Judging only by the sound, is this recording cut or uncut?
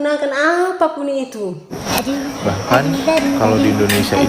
cut